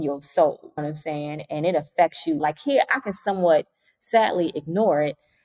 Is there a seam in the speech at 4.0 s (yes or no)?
no